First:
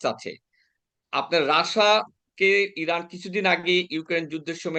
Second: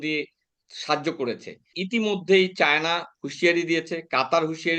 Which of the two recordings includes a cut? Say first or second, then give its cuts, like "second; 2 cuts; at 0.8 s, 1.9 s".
second; 1 cut; at 1.8 s